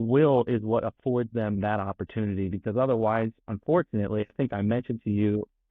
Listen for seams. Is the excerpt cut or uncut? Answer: uncut